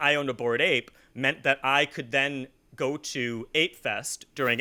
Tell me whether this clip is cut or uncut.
uncut